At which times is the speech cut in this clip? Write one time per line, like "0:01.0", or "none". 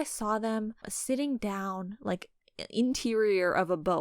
0:00.9